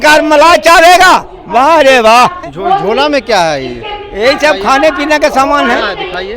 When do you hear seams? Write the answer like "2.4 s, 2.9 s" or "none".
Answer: 2.5 s